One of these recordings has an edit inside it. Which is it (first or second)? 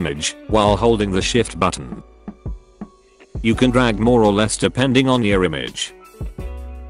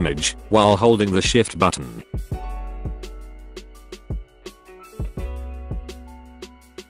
first